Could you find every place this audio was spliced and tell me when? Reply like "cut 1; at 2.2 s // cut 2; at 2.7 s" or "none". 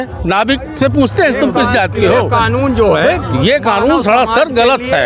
none